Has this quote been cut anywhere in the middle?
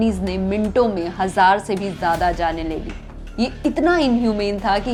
no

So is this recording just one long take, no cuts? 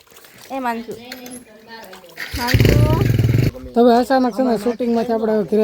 no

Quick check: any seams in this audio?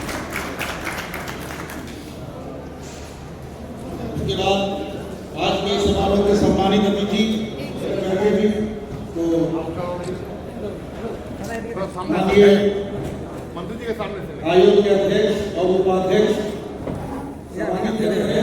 no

